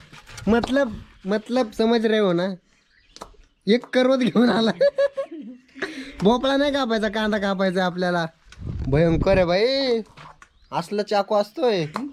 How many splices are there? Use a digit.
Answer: 0